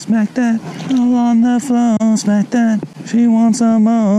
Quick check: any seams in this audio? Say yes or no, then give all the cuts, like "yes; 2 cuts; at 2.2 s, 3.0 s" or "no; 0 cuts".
yes; 1 cut; at 2.9 s